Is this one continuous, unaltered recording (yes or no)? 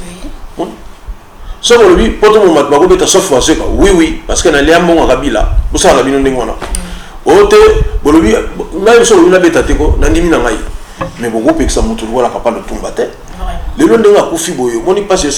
yes